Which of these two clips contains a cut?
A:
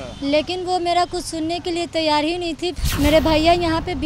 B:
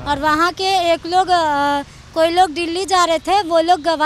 A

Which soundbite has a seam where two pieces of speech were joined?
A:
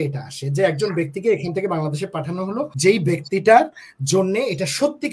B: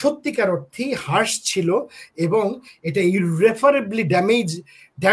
A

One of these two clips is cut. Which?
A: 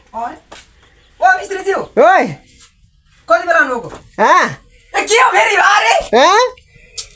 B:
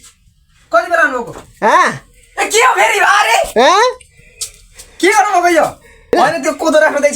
B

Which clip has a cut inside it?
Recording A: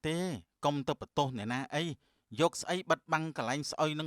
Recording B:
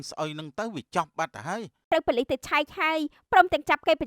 B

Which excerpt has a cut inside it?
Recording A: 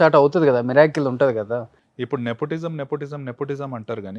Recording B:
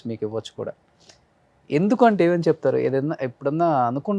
A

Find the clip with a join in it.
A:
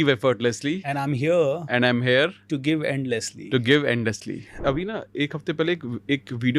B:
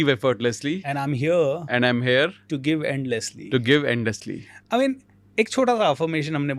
A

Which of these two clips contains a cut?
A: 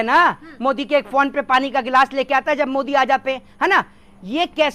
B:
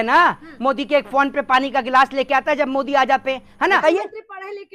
B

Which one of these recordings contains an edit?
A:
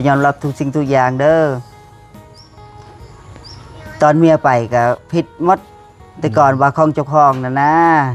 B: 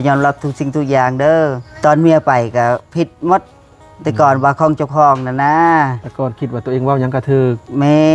B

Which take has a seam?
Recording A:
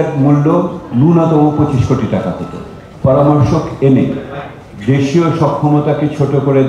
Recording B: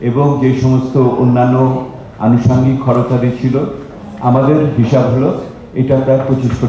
A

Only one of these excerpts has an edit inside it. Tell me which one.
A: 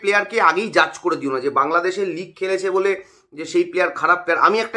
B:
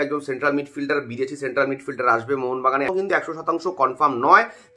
B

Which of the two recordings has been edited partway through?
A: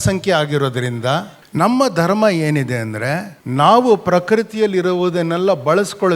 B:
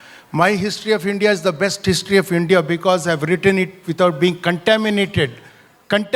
A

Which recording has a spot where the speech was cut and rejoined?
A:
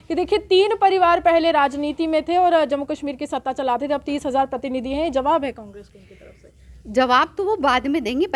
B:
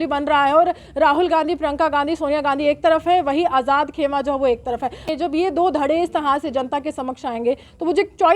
B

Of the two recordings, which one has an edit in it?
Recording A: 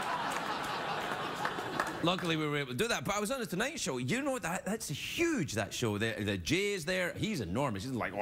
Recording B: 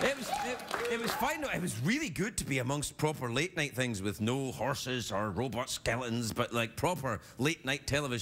B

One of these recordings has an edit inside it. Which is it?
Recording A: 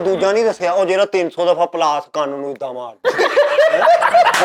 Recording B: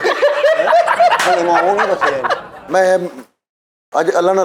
B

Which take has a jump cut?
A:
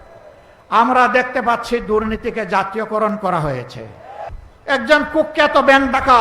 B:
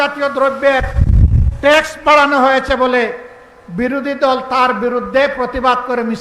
A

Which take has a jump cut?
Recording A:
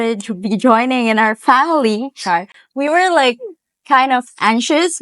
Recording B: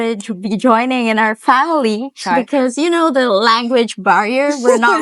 B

